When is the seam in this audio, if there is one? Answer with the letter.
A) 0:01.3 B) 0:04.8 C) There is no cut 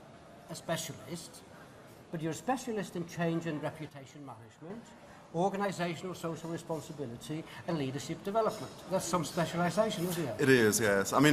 B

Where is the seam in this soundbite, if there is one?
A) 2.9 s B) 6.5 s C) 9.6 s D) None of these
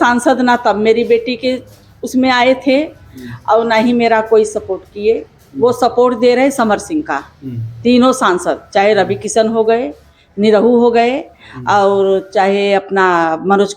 D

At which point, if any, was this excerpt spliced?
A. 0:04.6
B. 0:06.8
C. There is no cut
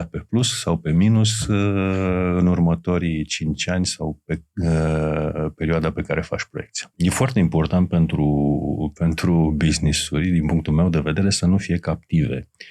B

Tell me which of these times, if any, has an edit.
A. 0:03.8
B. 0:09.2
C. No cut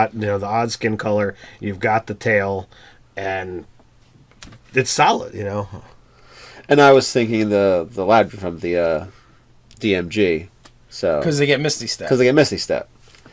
B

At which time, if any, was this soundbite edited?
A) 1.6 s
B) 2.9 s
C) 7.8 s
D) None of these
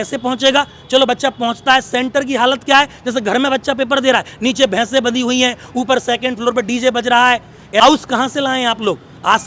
C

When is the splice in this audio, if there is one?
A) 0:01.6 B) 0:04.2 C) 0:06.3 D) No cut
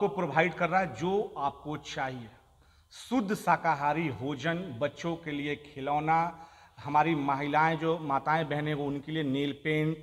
D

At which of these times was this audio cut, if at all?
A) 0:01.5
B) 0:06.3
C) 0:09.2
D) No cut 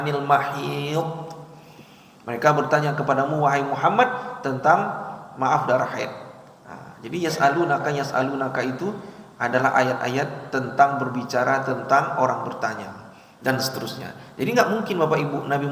D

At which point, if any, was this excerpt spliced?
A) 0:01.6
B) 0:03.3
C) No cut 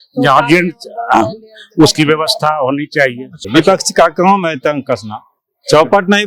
B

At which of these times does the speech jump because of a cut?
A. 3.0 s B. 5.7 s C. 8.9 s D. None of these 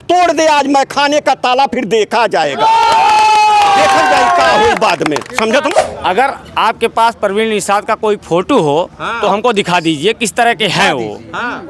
B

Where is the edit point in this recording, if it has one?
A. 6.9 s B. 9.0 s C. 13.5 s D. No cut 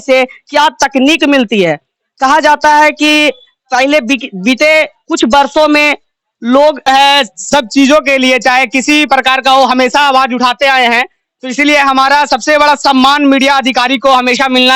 A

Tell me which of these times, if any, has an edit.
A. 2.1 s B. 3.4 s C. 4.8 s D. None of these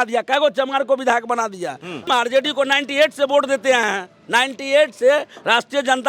A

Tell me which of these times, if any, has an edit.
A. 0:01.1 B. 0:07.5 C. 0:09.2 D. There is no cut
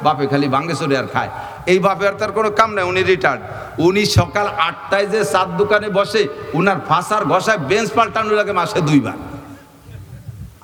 D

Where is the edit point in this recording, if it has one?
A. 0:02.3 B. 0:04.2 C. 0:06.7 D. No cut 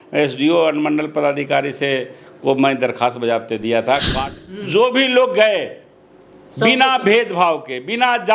B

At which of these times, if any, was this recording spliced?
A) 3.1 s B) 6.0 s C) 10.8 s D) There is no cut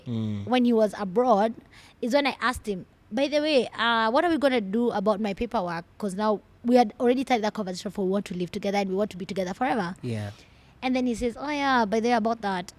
D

